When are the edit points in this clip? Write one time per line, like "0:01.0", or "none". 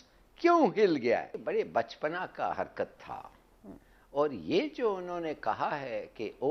0:01.4